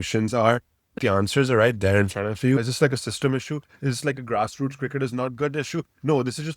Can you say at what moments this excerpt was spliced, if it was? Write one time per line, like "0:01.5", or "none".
0:01.0
0:02.6